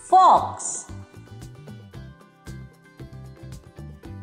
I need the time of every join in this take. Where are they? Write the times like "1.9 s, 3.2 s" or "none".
1.1 s